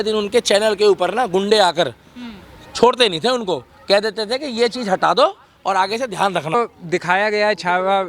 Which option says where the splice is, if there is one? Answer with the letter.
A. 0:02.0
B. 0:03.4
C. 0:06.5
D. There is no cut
C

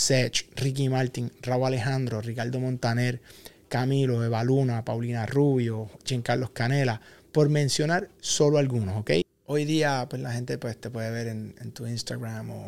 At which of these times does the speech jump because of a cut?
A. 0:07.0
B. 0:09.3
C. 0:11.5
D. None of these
B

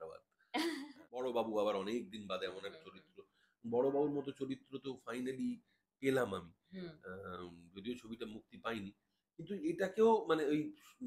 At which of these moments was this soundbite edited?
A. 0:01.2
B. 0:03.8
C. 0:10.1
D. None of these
A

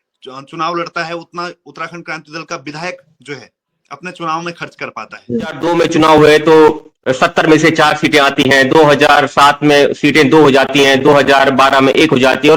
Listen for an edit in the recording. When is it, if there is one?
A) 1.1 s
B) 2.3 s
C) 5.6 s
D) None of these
C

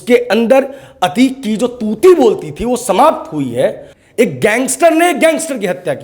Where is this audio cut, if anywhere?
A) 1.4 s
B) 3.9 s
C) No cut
B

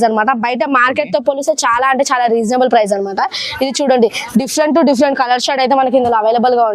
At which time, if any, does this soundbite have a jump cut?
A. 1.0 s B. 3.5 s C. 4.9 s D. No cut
D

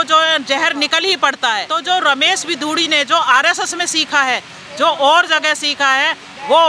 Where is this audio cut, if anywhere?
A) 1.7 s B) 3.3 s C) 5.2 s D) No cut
A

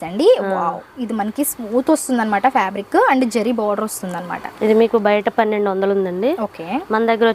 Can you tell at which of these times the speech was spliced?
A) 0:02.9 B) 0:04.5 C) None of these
C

